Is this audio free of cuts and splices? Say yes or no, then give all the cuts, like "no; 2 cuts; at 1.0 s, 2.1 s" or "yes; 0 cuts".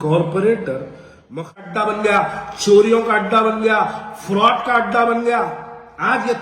no; 1 cut; at 1.6 s